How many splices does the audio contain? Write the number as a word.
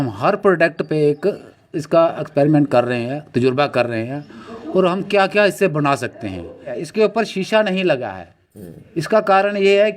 one